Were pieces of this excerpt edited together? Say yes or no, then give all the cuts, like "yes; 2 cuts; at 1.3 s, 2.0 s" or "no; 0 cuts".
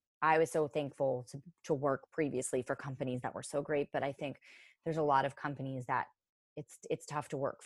no; 0 cuts